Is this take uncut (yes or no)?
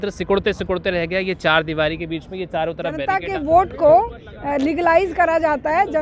no